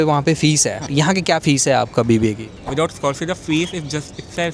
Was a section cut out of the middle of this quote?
no; 0 cuts

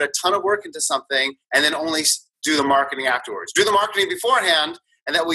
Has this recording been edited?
yes; 1 cut; at 1.4 s

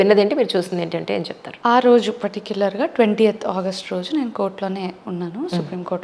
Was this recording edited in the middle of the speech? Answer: no; 0 cuts

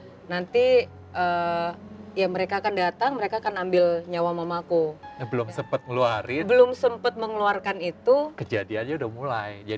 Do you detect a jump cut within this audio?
yes; 1 cut; at 5.1 s

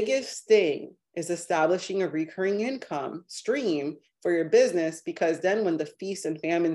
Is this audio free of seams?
yes; 0 cuts

